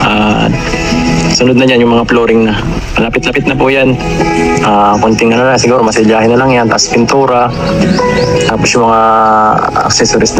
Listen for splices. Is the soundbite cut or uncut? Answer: uncut